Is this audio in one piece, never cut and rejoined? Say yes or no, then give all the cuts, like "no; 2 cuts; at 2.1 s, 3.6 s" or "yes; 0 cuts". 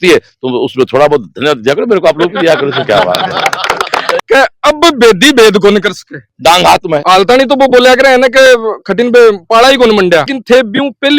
no; 2 cuts; at 4.2 s, 7.0 s